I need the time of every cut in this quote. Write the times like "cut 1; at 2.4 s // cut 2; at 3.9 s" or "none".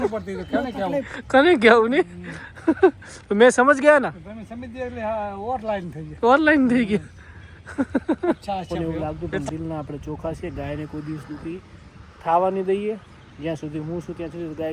cut 1; at 8.6 s